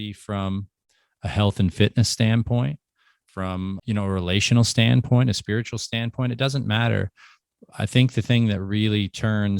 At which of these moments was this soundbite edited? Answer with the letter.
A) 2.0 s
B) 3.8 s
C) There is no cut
B